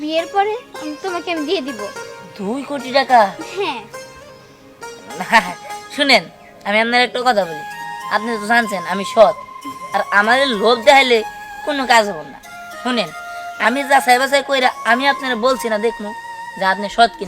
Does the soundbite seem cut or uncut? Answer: uncut